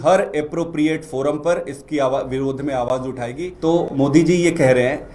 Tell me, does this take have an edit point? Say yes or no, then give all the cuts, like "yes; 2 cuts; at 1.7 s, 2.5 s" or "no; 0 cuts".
yes; 1 cut; at 3.4 s